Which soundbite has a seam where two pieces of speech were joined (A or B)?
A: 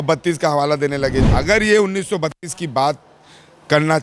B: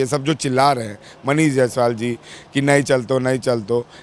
A